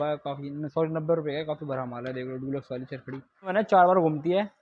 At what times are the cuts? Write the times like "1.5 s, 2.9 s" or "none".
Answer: 3.5 s